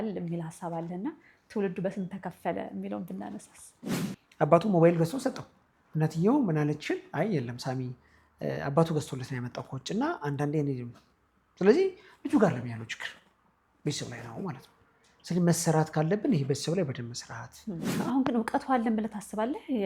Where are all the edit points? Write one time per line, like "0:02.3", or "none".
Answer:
0:03.9
0:17.9